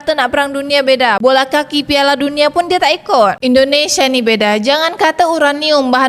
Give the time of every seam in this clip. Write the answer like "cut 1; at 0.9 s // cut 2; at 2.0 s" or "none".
cut 1; at 3.4 s